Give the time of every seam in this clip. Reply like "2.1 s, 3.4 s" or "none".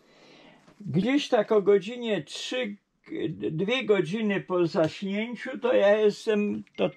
none